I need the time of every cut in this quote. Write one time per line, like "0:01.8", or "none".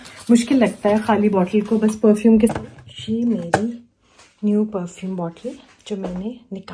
0:02.5